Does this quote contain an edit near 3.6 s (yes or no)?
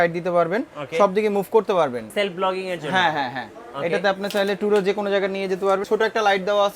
no